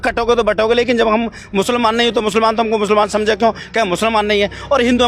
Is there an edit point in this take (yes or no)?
no